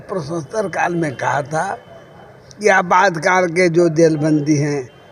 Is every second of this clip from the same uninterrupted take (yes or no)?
yes